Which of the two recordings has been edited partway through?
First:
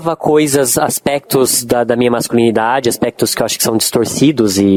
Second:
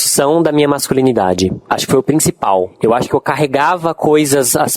second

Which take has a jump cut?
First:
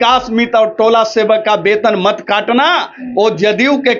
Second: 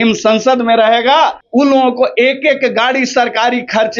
second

